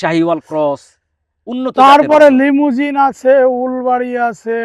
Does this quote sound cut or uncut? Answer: uncut